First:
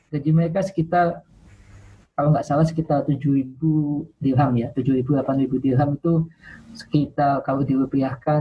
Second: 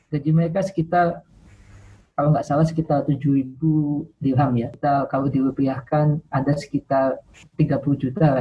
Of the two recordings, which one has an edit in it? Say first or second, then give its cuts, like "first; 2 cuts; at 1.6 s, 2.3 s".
second; 2 cuts; at 4.7 s, 7.5 s